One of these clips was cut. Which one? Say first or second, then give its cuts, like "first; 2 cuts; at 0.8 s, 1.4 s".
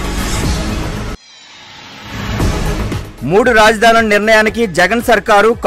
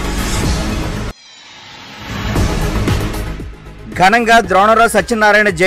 first; 2 cuts; at 1.3 s, 2.8 s